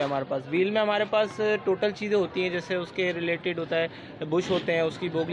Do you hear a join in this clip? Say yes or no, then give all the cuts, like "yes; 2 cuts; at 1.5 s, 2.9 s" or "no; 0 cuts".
no; 0 cuts